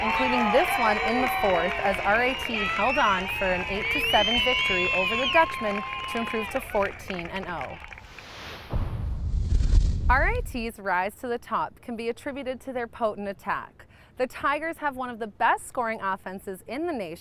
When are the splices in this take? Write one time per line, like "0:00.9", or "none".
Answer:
0:07.0